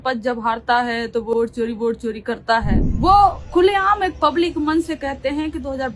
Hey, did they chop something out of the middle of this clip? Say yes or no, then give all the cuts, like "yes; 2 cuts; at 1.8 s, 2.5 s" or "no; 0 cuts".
yes; 1 cut; at 2.8 s